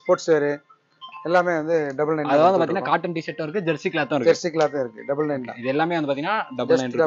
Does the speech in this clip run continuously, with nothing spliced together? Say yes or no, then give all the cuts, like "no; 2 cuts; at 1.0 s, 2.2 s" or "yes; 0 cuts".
yes; 0 cuts